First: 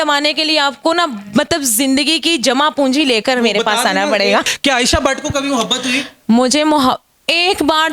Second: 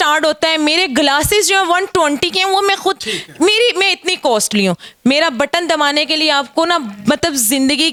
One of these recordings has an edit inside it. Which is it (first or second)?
first